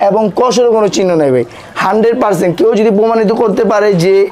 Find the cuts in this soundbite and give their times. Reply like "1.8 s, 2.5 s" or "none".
none